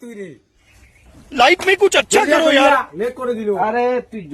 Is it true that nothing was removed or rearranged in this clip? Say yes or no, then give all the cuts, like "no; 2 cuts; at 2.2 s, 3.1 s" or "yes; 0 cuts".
yes; 0 cuts